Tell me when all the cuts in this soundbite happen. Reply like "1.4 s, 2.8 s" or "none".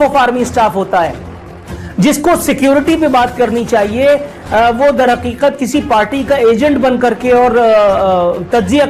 none